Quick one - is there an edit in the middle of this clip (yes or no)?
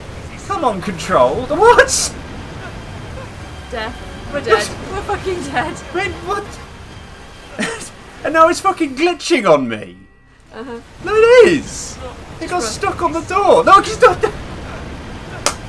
no